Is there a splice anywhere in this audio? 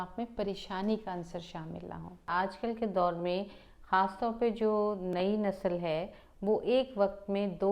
yes; 1 cut; at 2.3 s

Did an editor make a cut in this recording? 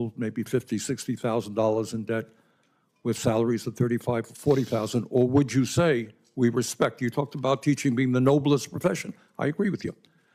no; 0 cuts

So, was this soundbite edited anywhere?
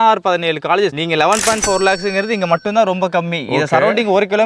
yes; 1 cut; at 1.0 s

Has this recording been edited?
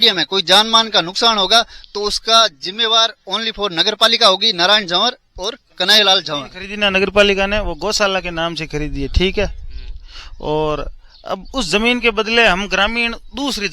yes; 1 cut; at 6.6 s

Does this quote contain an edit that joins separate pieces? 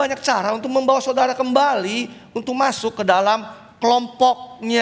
no; 0 cuts

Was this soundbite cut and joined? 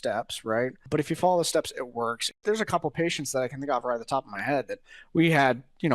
yes; 1 cut; at 2.3 s

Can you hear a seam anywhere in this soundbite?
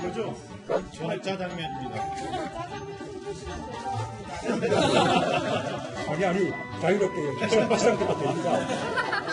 no; 0 cuts

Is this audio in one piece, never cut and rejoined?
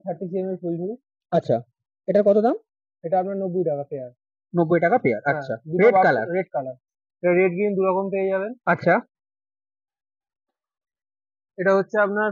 yes; 0 cuts

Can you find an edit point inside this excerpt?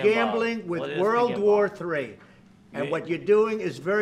no; 0 cuts

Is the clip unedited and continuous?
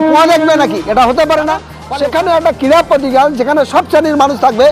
no; 1 cut; at 1.8 s

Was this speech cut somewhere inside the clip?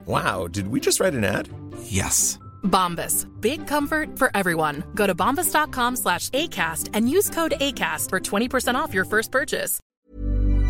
yes; 1 cut; at 9.8 s

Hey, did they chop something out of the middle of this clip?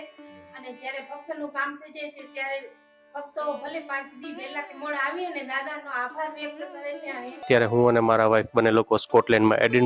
yes; 1 cut; at 7.4 s

